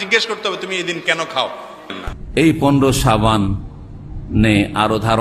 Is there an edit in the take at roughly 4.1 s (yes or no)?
no